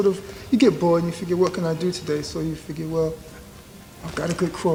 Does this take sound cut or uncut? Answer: uncut